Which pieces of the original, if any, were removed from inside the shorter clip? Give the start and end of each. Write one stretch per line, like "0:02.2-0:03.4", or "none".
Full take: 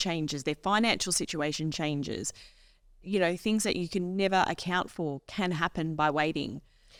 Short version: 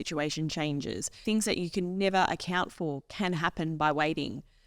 0:02.4-0:03.4